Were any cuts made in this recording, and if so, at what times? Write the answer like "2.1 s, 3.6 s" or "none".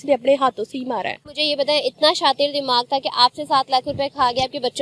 1.3 s

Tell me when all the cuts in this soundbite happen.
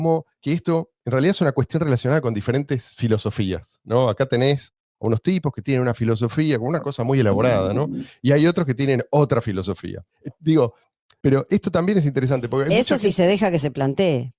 none

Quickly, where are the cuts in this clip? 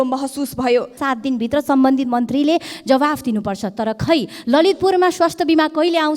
1.0 s

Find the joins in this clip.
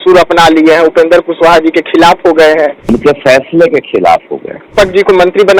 2.8 s, 4.7 s

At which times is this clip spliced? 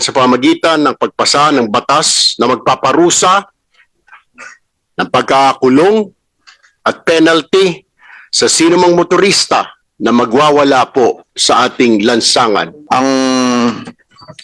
12.7 s

